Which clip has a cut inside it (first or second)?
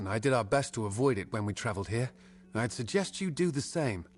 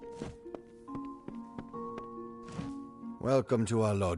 second